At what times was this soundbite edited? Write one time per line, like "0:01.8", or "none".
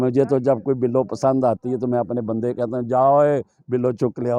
none

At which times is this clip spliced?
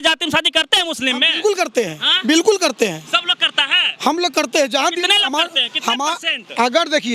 none

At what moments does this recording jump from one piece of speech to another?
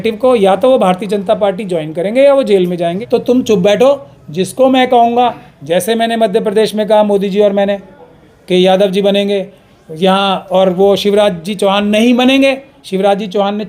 0:03.0

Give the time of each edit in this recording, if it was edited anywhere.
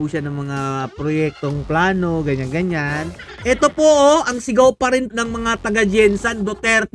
0:03.2
0:05.1

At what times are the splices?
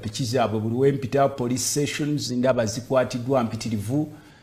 none

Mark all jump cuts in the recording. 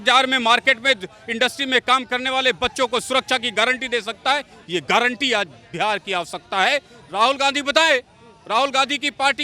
none

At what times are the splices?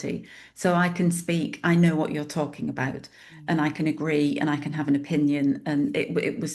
none

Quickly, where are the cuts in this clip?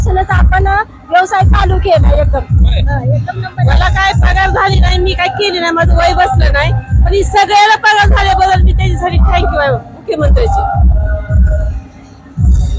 none

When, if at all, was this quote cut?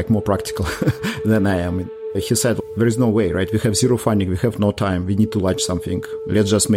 0:02.0

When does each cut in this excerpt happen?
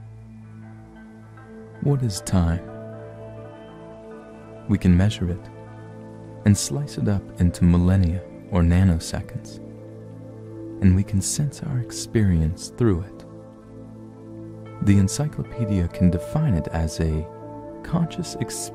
none

